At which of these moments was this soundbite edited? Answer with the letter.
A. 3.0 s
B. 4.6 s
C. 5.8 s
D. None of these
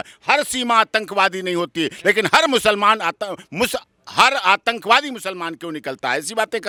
D